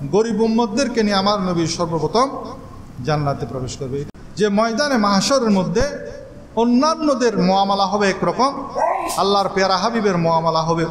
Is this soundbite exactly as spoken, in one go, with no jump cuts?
no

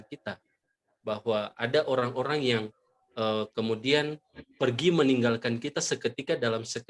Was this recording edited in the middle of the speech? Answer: no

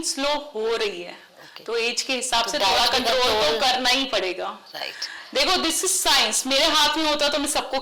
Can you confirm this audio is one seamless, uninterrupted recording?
yes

